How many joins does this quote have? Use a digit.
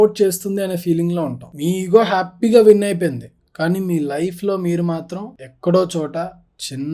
1